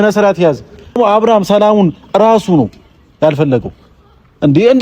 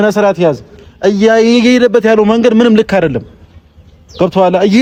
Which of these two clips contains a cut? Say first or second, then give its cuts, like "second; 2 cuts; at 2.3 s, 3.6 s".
first; 1 cut; at 1.0 s